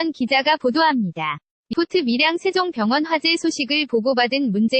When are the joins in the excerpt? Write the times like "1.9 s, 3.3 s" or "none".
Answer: 1.7 s